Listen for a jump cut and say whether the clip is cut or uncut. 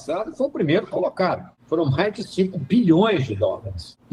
uncut